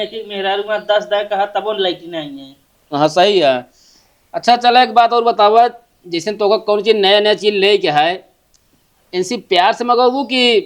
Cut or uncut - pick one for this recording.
uncut